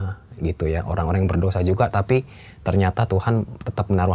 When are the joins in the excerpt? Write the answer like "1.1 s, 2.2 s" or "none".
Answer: none

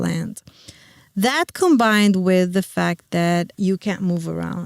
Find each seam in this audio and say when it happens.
3.5 s

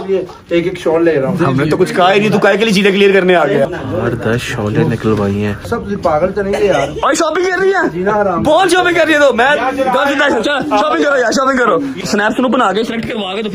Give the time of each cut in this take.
3.7 s, 5.7 s, 12.0 s

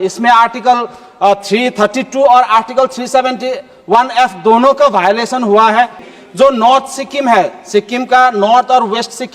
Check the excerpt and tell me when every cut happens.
6.0 s

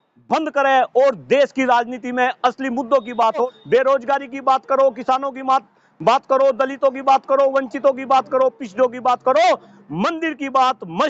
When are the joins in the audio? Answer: 3.4 s

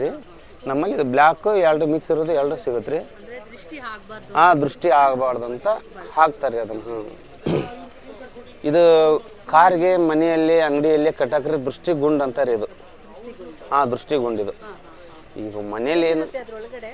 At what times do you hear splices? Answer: none

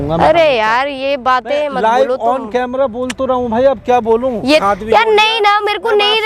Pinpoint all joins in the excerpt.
4.6 s

